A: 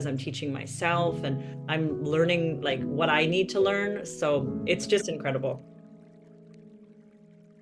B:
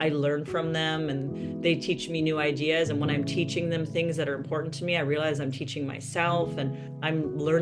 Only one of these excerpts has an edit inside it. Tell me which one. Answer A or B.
A